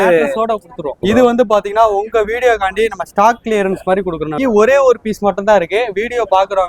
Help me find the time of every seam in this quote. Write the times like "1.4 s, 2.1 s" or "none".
1.0 s, 4.4 s